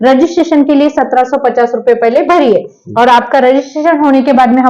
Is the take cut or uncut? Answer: uncut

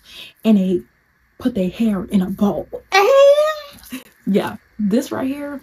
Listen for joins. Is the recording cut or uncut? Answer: uncut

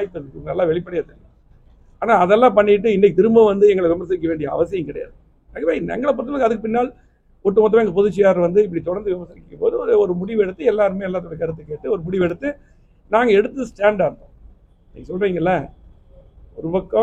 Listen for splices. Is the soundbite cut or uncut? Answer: uncut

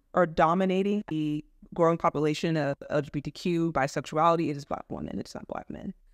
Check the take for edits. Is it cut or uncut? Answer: cut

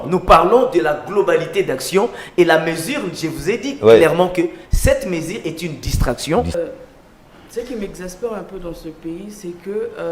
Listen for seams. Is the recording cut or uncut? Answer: cut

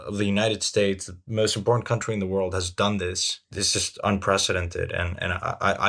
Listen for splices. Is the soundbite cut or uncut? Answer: cut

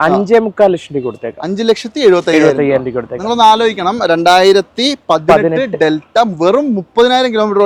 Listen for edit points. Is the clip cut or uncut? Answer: uncut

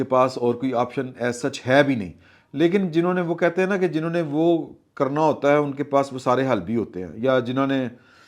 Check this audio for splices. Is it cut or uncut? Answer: uncut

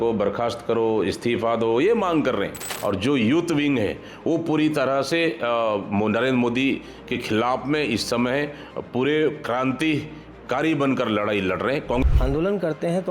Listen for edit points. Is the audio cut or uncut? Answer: cut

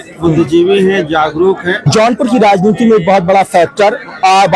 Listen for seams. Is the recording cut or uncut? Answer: cut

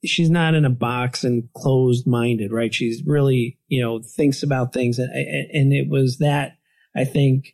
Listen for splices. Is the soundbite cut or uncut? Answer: uncut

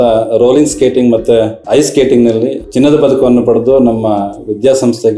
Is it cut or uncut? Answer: cut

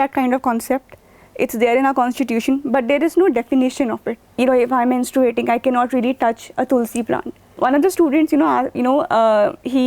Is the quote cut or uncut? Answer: cut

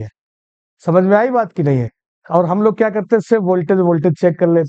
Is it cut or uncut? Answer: uncut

